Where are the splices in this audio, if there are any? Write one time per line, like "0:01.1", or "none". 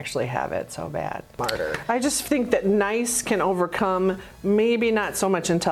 0:01.3